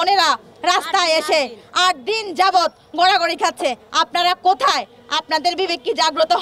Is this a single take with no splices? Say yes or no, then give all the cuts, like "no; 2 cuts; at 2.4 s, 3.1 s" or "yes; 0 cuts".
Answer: yes; 0 cuts